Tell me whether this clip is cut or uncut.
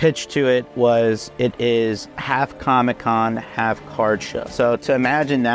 uncut